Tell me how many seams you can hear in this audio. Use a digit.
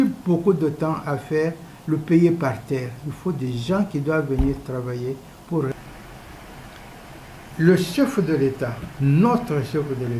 1